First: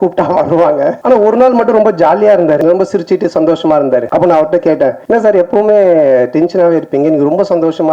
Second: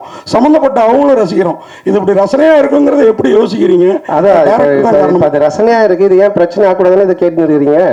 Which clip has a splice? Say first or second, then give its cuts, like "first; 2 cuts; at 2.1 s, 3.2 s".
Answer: first; 4 cuts; at 1.0 s, 2.6 s, 4.1 s, 5.0 s